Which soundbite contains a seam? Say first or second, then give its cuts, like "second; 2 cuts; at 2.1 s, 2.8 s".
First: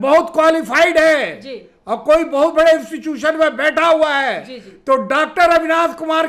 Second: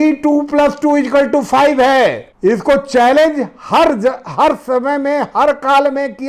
second; 1 cut; at 2.3 s